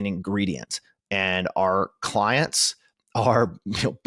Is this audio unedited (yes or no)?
yes